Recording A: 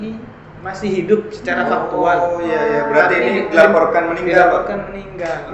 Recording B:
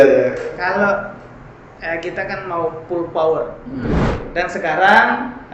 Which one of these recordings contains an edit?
B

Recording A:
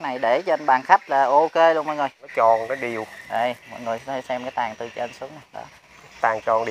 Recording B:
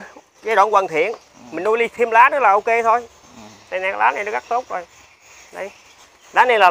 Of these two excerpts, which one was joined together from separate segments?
A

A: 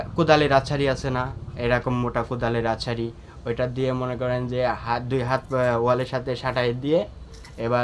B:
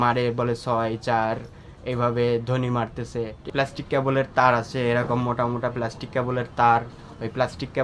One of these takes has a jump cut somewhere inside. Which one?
B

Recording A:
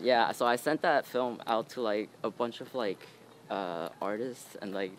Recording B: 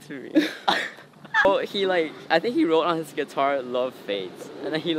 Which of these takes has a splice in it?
B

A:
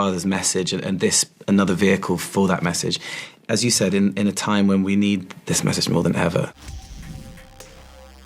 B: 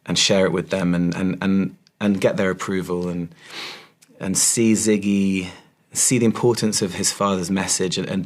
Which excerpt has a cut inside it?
A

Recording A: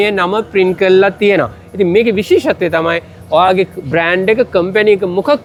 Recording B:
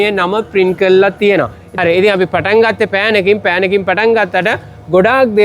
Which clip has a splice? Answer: B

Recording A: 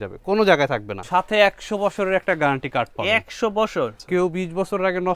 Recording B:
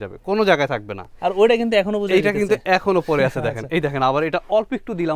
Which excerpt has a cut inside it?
A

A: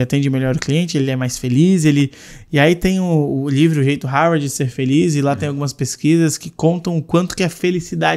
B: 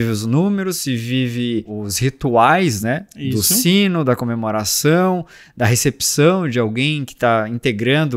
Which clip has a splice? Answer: B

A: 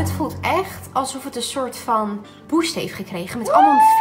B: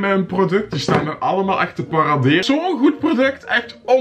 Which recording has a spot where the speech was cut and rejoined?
B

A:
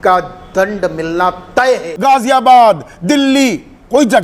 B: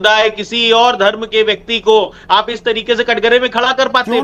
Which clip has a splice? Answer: A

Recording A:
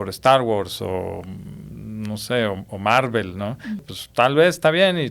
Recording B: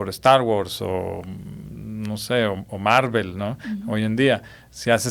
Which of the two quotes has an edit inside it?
A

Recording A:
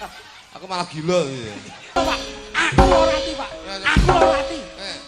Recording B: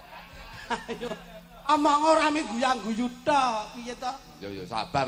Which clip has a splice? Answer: A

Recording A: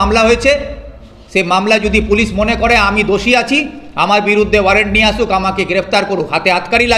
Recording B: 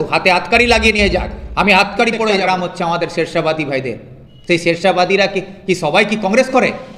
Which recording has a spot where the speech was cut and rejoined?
B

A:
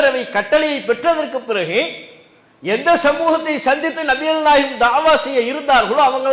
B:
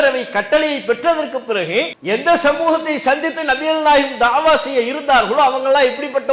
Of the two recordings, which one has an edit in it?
B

